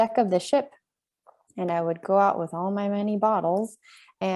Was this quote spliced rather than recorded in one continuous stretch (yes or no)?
no